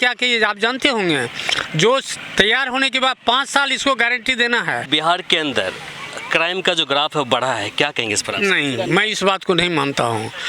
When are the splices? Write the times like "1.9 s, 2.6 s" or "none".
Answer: 4.9 s